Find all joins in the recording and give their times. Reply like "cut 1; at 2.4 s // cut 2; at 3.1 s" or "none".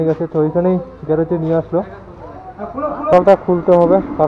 cut 1; at 3.1 s